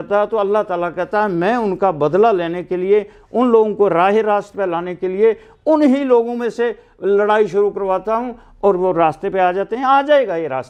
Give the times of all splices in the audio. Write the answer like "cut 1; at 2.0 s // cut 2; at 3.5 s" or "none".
none